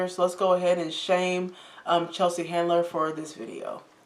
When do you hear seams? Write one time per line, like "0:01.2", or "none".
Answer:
none